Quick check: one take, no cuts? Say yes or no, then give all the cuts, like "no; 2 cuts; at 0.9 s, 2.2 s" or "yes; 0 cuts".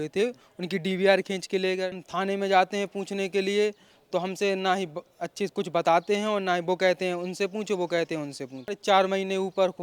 no; 2 cuts; at 2.0 s, 8.8 s